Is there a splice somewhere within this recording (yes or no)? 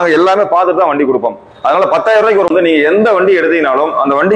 yes